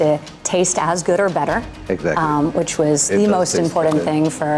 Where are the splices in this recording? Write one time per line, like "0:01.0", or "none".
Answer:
none

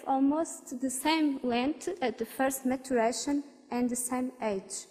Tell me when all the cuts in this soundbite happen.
0:02.4

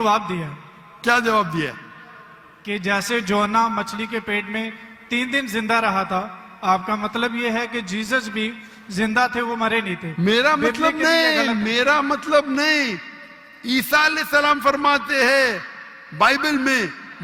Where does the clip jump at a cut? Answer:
none

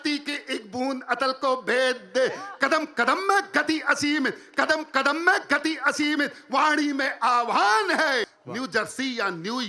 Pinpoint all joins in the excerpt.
0:08.4

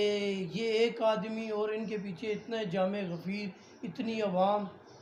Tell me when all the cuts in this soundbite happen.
none

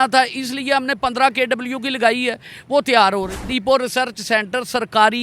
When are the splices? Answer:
0:03.4

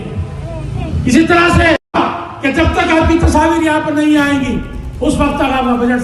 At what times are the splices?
0:01.9

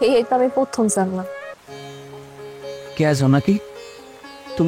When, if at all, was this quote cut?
0:01.5

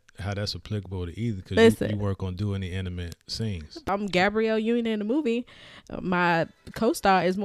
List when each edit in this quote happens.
0:03.8

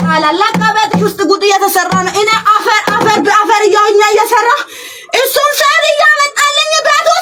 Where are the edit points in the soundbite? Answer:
none

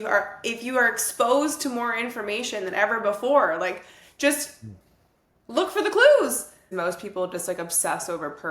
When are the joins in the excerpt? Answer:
0:06.7

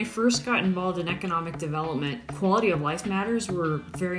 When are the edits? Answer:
0:02.2

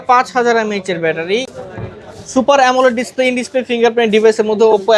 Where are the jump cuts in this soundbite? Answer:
0:01.5

